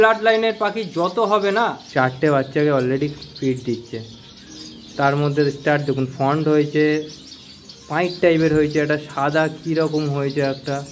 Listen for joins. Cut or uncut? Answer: cut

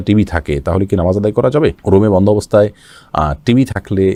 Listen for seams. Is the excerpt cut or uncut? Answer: uncut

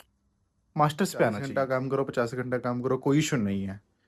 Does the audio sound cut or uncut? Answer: cut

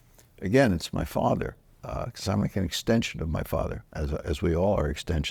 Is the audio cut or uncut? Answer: uncut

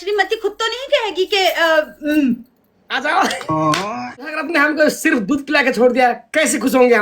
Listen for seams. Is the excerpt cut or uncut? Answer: cut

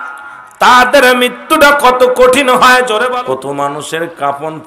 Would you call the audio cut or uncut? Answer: cut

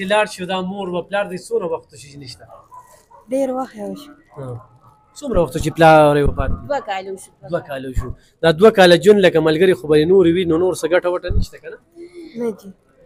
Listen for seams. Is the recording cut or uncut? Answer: uncut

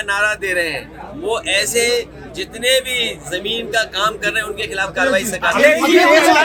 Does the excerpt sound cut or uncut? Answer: uncut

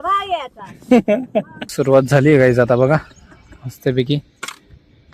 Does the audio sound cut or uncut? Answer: cut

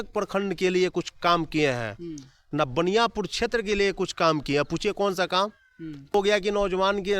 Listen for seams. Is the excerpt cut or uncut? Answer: cut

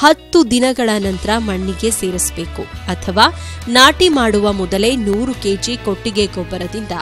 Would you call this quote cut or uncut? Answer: uncut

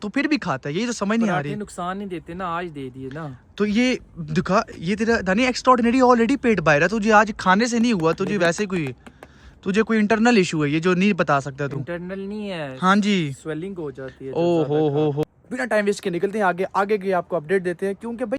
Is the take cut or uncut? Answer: uncut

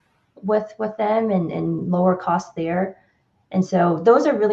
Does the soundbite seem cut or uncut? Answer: uncut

